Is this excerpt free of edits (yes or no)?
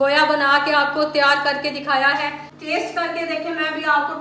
no